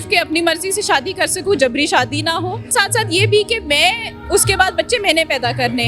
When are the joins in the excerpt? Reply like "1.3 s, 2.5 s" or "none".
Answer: 2.7 s